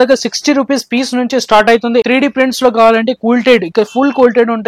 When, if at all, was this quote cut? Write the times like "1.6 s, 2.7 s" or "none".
2.0 s